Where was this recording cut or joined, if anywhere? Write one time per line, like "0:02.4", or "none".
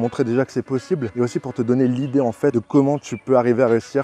0:01.1
0:02.5